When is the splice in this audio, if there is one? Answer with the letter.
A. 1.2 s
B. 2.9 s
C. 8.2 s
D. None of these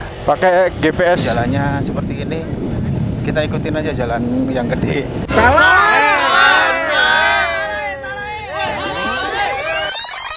A